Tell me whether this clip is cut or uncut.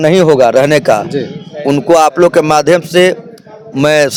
uncut